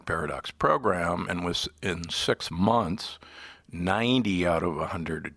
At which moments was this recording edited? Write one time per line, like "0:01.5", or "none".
none